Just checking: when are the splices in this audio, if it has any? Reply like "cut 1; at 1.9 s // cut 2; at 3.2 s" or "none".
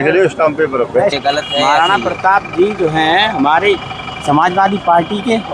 cut 1; at 1.2 s